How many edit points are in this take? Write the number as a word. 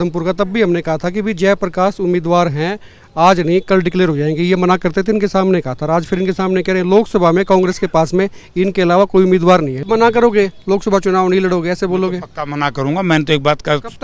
one